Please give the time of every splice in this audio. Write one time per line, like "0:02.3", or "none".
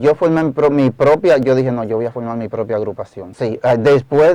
0:03.2